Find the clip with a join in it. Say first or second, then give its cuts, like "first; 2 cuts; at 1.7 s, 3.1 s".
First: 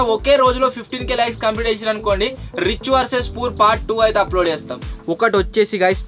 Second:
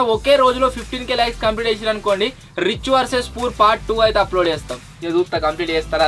first; 1 cut; at 4.9 s